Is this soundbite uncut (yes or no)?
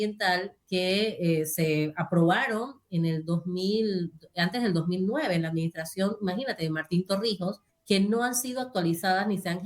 no